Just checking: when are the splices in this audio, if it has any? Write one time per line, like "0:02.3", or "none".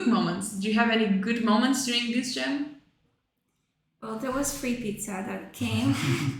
none